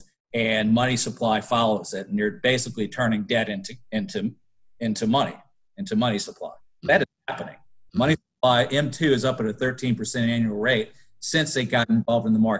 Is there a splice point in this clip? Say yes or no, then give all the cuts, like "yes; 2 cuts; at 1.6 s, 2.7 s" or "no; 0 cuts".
no; 0 cuts